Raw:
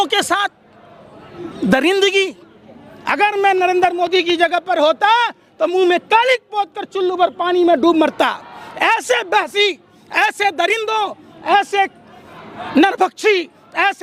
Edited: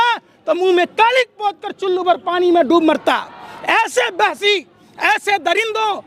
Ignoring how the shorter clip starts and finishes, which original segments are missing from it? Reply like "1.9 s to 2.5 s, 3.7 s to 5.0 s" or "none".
none

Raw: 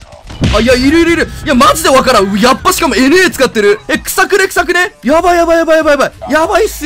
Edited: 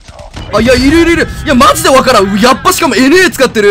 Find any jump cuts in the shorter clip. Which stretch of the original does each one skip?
none

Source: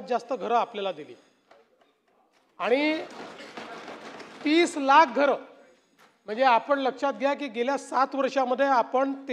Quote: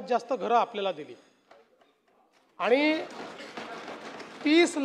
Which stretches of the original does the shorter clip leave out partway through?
none

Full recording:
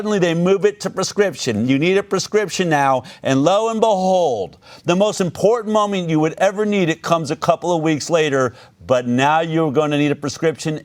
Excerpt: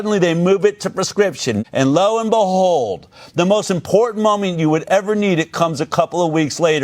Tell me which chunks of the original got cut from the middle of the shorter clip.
1.6 s to 3.1 s

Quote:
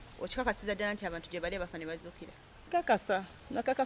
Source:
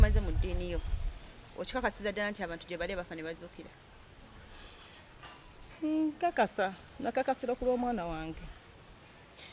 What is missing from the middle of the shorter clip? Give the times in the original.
4.0 s to 6.2 s

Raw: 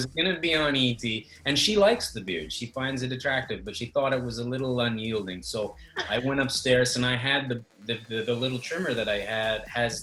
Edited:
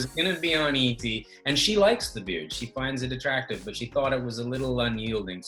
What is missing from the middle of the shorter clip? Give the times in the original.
none

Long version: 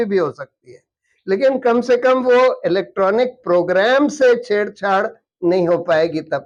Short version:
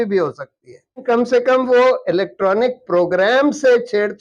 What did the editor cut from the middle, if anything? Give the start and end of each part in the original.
1.0 s to 1.6 s

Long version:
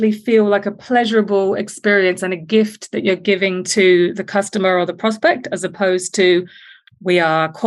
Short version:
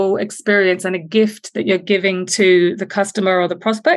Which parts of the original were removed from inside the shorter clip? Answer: none

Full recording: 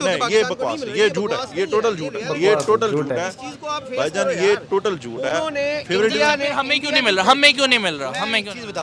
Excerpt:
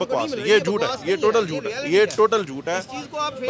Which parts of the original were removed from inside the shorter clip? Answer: none

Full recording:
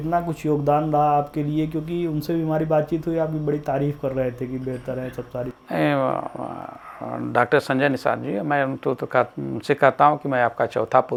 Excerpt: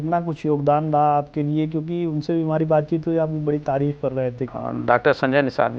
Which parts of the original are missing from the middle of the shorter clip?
4.5 s to 6.9 s

